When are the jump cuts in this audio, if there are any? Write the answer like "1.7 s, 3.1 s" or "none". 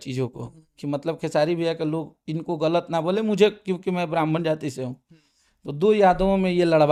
none